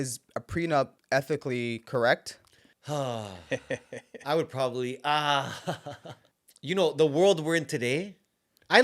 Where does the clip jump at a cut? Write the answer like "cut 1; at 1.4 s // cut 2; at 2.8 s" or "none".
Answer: cut 1; at 1.0 s